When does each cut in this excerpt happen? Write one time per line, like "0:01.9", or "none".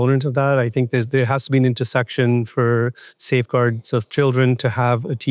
none